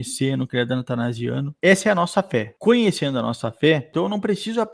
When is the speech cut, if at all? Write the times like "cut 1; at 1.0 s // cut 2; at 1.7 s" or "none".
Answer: cut 1; at 1.5 s // cut 2; at 2.5 s // cut 3; at 3.9 s

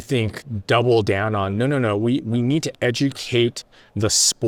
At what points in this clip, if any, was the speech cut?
none

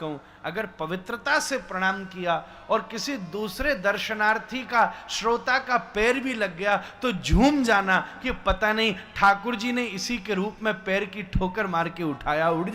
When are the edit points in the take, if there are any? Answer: none

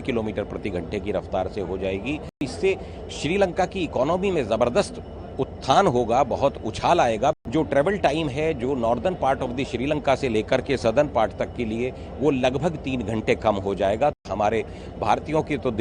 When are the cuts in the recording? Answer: cut 1; at 2.5 s // cut 2; at 7.4 s // cut 3; at 14.3 s

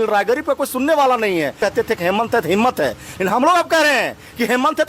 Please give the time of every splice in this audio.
cut 1; at 1.6 s

